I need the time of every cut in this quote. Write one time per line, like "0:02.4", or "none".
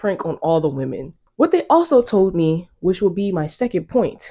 none